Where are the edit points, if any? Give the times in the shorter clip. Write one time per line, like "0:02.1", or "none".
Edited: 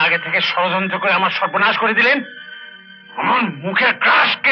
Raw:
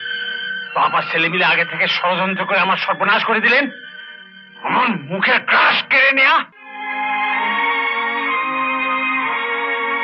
none